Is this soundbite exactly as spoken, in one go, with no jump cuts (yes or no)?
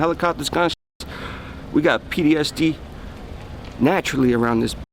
yes